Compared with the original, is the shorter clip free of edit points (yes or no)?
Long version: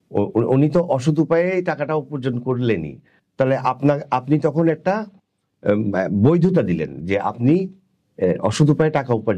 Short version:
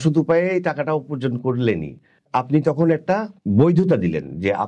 no